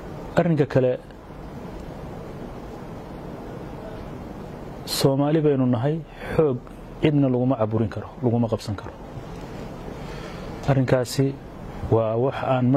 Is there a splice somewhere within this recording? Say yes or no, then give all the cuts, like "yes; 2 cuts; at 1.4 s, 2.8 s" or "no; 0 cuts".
no; 0 cuts